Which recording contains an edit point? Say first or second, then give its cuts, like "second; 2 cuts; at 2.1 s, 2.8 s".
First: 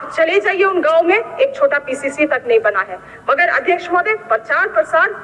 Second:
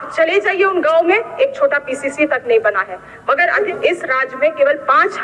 second; 1 cut; at 3.7 s